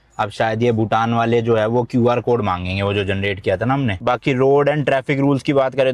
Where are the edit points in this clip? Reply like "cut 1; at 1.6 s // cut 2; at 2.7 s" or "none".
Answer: cut 1; at 3.9 s